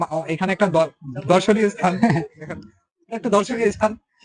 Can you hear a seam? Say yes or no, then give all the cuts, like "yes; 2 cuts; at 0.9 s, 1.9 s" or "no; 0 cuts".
no; 0 cuts